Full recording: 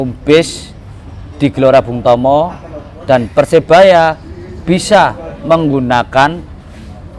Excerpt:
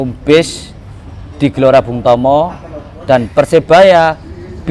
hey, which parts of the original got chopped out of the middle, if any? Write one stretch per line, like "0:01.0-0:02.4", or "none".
none